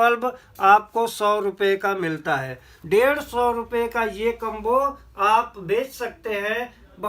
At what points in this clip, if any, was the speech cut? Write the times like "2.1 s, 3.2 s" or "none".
2.7 s